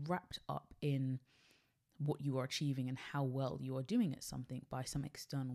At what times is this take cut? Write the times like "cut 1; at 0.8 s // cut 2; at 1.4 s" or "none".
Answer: none